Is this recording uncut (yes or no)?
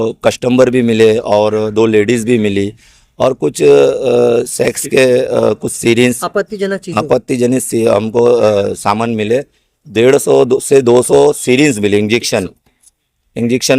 yes